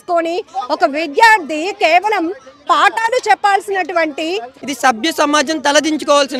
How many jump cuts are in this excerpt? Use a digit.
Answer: 1